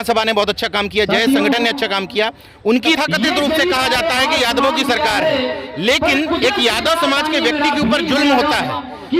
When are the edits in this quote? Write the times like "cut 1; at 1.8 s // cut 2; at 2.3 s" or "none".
cut 1; at 2.8 s